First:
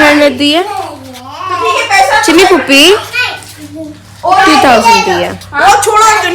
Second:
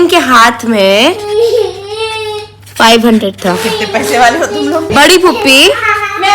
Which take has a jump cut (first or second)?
second